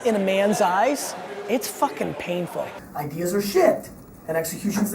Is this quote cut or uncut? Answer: cut